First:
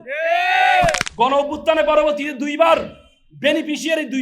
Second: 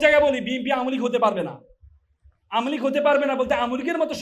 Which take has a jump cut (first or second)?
first